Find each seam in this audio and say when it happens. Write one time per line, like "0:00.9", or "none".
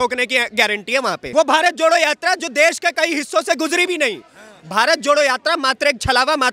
0:01.2